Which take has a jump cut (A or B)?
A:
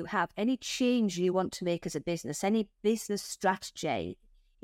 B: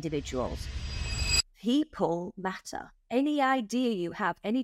B